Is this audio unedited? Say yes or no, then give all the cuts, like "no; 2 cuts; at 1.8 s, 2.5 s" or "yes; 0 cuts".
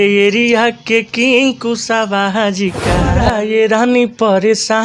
no; 1 cut; at 3.2 s